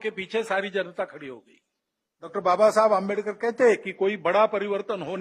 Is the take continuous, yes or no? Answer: no